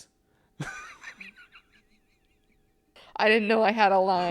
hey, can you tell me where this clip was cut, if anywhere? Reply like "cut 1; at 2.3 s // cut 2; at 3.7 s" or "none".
cut 1; at 2.9 s